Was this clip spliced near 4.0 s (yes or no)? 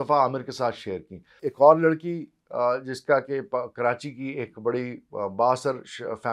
no